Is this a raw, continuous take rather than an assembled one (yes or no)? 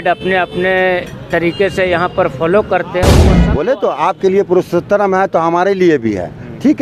no